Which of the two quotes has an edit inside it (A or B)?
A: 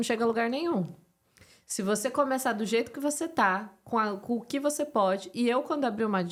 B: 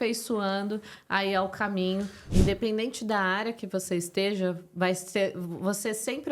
B